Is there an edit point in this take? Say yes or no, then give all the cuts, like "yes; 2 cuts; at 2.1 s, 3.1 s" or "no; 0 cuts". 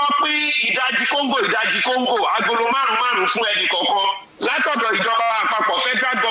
no; 0 cuts